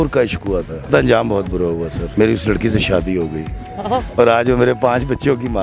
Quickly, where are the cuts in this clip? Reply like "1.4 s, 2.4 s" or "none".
0.9 s, 2.0 s